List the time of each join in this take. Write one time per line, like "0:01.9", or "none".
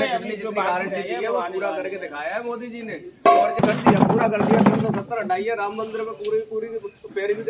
0:03.6